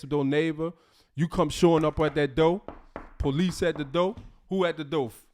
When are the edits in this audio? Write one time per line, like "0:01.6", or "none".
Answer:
none

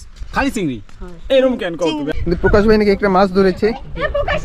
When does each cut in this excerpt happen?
0:02.1

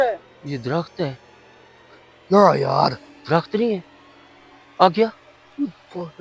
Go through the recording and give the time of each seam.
none

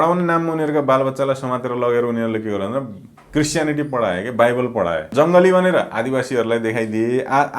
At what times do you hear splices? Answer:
0:05.1

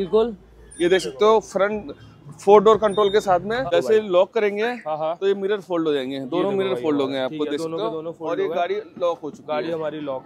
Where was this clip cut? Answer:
0:03.7

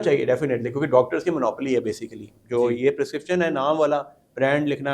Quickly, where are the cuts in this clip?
none

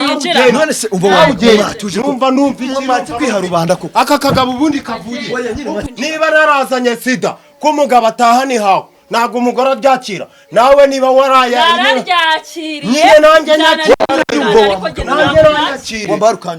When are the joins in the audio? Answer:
0:05.8

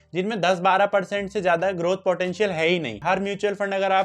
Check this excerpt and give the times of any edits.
0:03.0

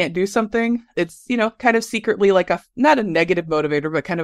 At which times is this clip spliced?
0:00.9

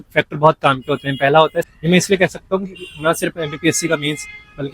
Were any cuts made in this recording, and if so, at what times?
0:01.7

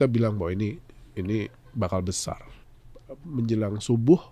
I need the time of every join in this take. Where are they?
0:02.5

